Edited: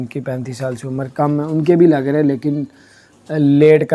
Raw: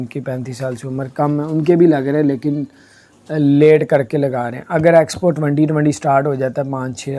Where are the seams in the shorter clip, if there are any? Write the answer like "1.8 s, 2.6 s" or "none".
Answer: none